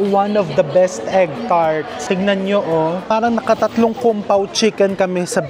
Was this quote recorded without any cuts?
no; 2 cuts; at 1.9 s, 3.0 s

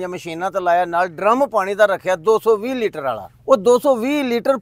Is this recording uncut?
no; 1 cut; at 3.3 s

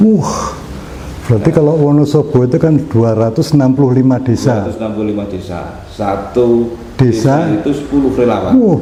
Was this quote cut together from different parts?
no; 0 cuts

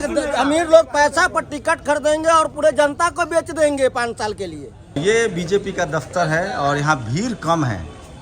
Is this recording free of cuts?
no; 1 cut; at 5.0 s

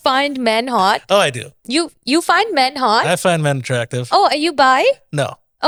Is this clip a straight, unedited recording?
yes; 0 cuts

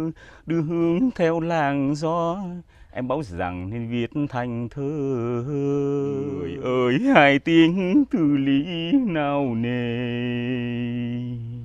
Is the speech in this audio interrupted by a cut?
yes; 1 cut; at 6.4 s

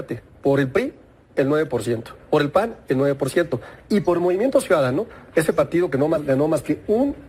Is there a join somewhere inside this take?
no; 0 cuts

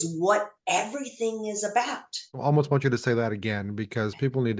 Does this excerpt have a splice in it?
yes; 1 cut; at 2.3 s

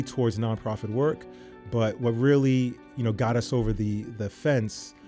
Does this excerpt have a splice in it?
no; 0 cuts

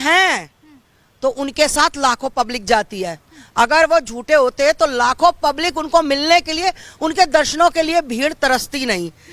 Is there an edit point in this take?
no; 0 cuts

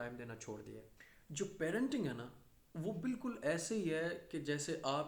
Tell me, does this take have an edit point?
no; 0 cuts

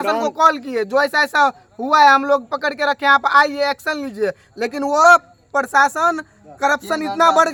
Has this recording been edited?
no; 0 cuts

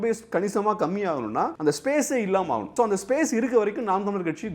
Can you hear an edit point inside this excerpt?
yes; 2 cuts; at 1.6 s, 2.7 s

